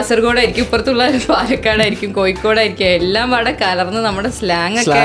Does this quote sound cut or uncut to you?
uncut